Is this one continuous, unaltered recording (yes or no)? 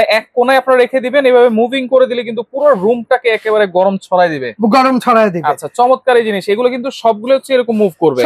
yes